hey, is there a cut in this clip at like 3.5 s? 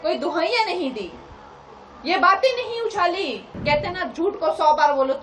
yes; 1 cut; at 3.5 s

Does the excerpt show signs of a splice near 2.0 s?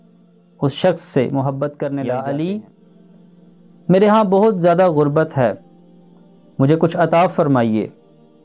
yes; 1 cut; at 2.0 s

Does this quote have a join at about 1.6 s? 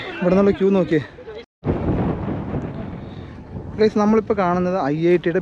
yes; 1 cut; at 1.6 s

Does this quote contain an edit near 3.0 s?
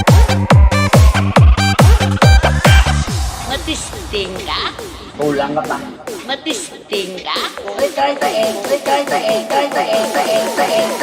yes; 1 cut; at 3.0 s

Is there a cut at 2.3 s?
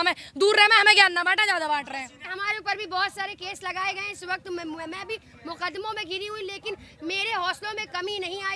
yes; 1 cut; at 2.3 s

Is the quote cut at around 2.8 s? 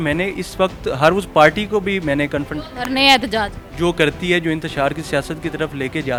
no; 0 cuts

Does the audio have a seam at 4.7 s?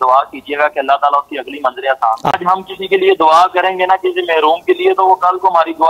no; 1 cut; at 2.3 s

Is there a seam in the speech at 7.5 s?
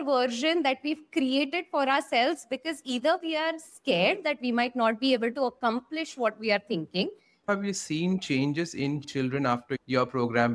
yes; 1 cut; at 7.5 s

